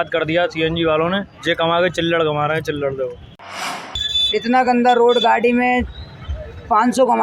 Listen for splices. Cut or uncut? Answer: cut